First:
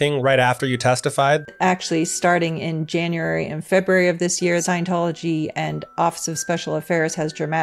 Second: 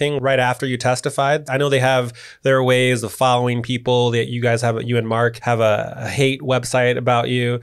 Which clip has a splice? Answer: first; 2 cuts; at 1.5 s, 4.6 s

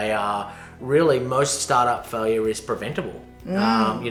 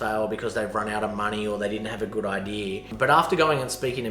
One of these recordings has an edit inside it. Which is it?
second; 1 cut; at 2.9 s

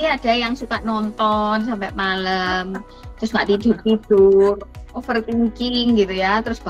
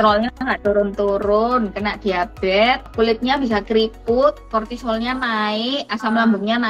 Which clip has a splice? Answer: second; 2 cuts; at 2.9 s, 4.4 s

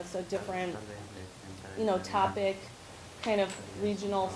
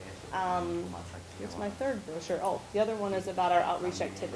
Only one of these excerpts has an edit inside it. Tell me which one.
first; 1 cut; at 2.3 s

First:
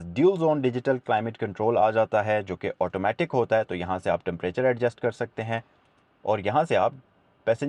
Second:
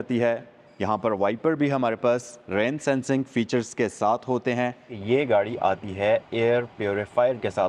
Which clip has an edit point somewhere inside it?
second; 1 cut; at 4.9 s

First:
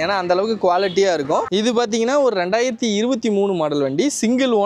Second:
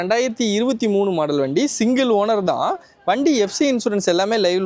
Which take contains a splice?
first; 1 cut; at 1.5 s

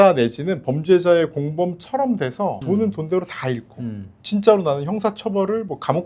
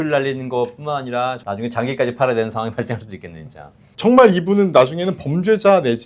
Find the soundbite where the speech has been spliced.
second; 1 cut; at 3.8 s

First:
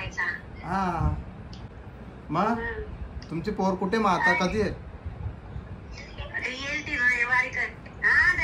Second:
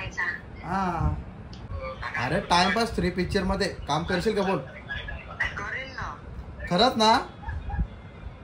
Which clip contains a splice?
second; 1 cut; at 1.7 s

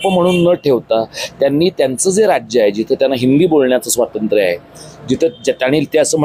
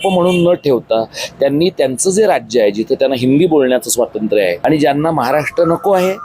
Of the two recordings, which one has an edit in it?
second; 1 cut; at 4.6 s

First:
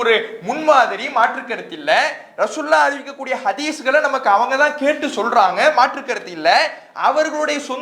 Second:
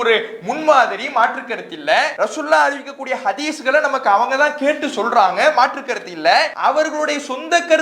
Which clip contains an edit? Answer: second; 2 cuts; at 2.1 s, 6.5 s

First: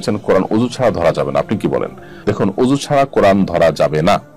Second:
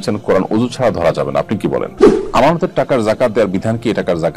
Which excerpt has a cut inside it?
second; 1 cut; at 2.2 s

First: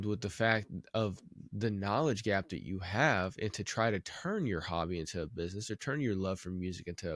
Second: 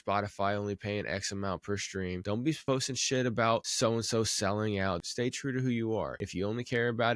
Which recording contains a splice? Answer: second; 4 cuts; at 2.5 s, 3.7 s, 5.0 s, 6.2 s

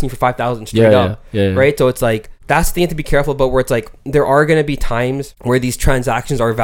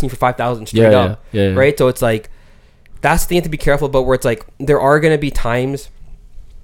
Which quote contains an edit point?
first; 2 cuts; at 2.3 s, 5.3 s

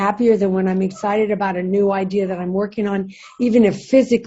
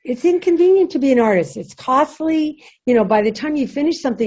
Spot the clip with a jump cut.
second; 1 cut; at 2.7 s

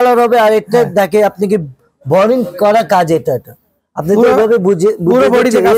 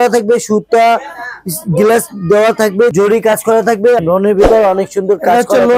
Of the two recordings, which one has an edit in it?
second; 2 cuts; at 2.9 s, 4.0 s

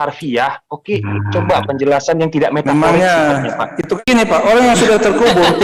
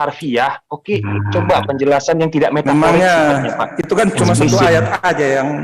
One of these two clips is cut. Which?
first; 1 cut; at 4.0 s

